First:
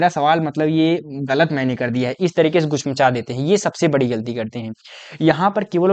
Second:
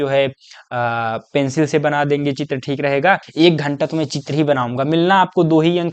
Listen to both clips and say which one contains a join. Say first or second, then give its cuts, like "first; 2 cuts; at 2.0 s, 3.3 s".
second; 1 cut; at 3.3 s